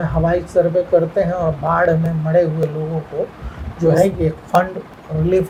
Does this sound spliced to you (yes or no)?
no